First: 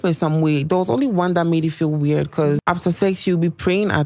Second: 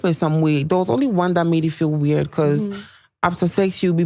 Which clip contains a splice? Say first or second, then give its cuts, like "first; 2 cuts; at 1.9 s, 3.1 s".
first; 1 cut; at 2.6 s